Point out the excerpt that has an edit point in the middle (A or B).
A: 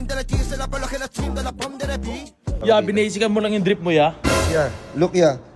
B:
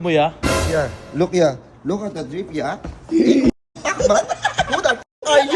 A